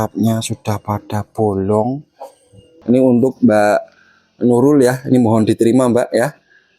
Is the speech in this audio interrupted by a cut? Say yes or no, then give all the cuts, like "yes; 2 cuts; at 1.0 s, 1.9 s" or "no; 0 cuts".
yes; 1 cut; at 2.7 s